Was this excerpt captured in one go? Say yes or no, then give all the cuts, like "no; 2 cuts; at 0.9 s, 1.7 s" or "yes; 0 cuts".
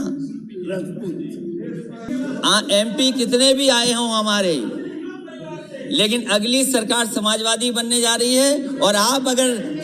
no; 1 cut; at 2.1 s